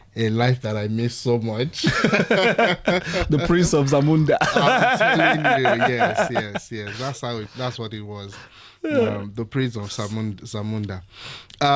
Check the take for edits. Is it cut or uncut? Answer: uncut